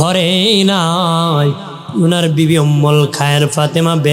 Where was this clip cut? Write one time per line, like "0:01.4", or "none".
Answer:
none